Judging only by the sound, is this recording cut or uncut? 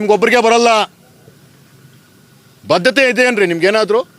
uncut